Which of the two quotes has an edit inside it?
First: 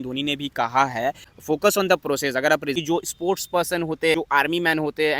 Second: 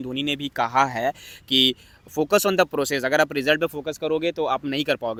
first; 3 cuts; at 1.3 s, 2.7 s, 4.1 s

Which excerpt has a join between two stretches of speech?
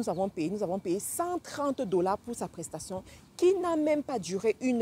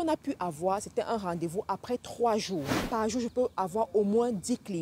second; 1 cut; at 2.8 s

